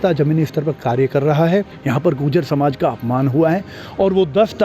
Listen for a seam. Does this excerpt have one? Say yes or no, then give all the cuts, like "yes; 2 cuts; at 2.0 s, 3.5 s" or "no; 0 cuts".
yes; 1 cut; at 1.7 s